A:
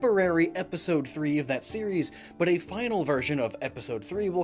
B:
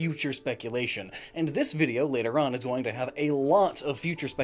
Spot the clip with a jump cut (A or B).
B